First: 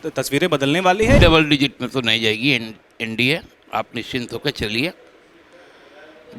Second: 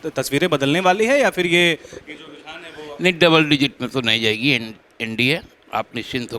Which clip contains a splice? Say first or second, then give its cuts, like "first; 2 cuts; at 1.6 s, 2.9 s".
first; 1 cut; at 1.2 s